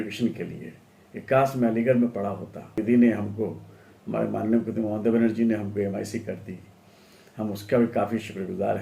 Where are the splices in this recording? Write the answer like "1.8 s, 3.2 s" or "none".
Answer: 2.8 s